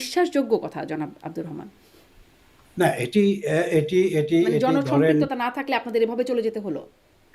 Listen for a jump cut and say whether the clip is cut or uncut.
uncut